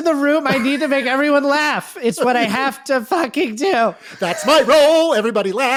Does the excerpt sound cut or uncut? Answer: uncut